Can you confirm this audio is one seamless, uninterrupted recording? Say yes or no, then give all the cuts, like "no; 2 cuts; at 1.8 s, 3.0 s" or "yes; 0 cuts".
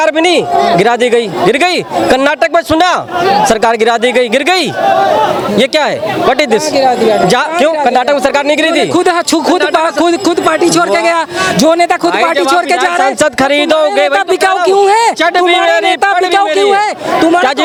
yes; 0 cuts